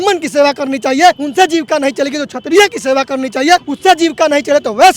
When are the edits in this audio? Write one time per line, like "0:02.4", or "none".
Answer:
0:01.2
0:03.7